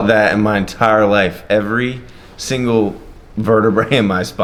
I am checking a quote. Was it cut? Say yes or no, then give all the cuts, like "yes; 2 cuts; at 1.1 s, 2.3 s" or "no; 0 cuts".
no; 0 cuts